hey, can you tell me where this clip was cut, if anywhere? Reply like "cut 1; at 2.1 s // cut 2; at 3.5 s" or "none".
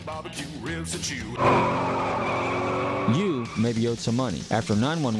cut 1; at 1.2 s